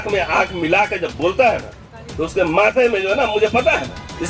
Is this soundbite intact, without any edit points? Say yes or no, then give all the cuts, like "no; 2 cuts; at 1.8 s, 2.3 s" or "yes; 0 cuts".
yes; 0 cuts